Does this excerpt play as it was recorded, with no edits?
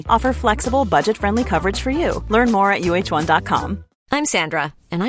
yes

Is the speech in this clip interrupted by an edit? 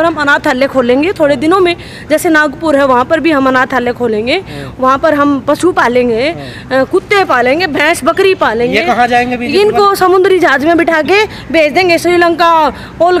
no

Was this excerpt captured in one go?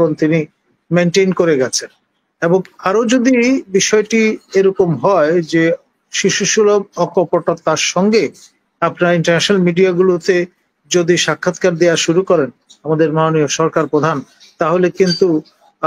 yes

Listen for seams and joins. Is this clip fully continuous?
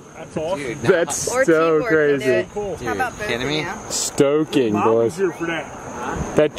yes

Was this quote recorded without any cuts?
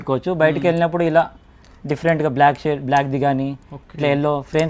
yes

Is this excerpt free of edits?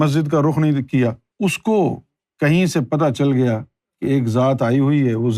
no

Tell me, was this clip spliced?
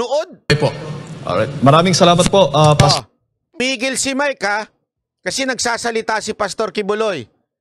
yes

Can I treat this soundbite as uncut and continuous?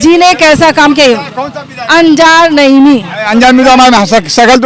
yes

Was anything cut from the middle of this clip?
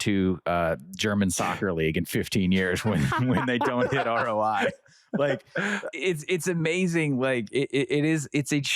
yes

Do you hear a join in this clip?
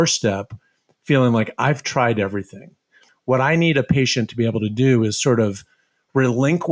yes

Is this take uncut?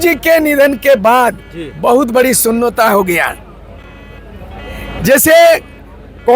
yes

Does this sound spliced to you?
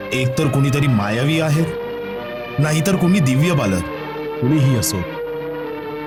no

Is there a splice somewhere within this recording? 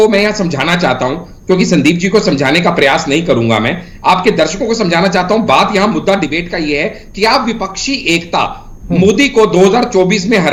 no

